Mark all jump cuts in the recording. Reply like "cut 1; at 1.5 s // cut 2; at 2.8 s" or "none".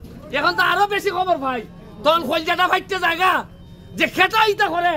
none